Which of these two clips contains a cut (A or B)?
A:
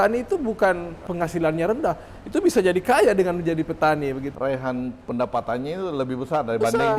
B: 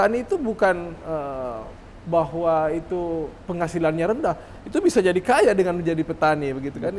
A